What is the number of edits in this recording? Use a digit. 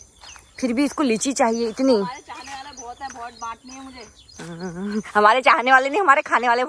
0